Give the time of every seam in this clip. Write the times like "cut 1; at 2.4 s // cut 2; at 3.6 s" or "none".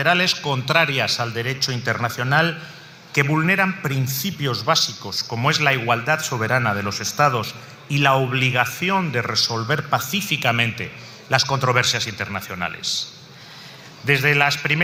none